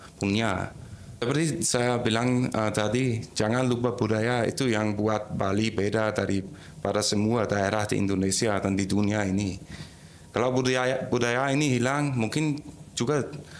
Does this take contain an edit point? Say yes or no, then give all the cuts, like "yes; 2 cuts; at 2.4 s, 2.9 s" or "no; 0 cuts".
yes; 1 cut; at 1.2 s